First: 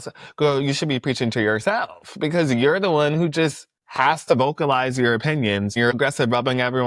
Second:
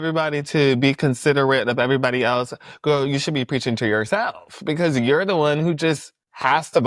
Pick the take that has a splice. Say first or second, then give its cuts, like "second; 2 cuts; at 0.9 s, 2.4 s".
first; 1 cut; at 5.9 s